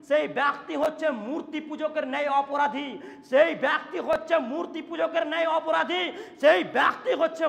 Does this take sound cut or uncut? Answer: uncut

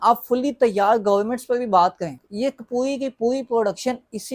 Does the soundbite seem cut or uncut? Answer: cut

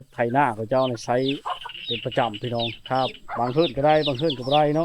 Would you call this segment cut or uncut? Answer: uncut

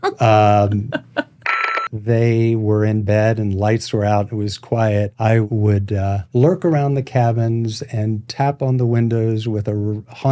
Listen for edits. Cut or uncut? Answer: cut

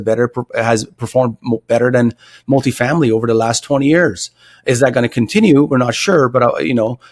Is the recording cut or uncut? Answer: uncut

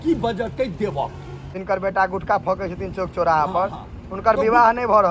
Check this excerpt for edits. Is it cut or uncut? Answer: cut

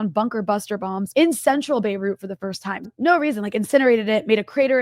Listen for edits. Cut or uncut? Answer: cut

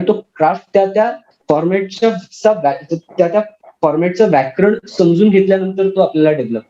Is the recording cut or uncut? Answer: uncut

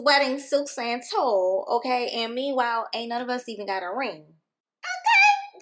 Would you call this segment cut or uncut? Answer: uncut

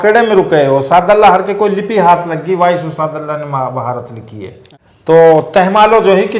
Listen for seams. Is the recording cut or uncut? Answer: cut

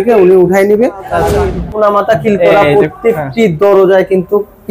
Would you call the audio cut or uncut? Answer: cut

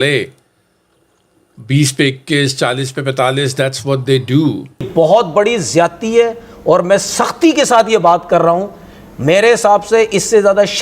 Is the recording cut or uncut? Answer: cut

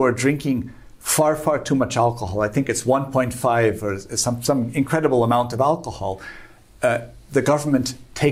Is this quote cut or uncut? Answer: uncut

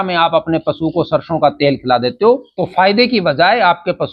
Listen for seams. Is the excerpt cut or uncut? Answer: cut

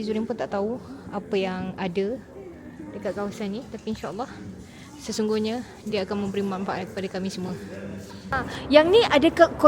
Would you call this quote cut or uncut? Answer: cut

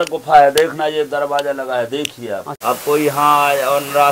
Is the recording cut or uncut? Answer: cut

